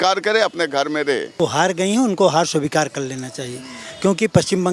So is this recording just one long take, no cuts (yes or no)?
no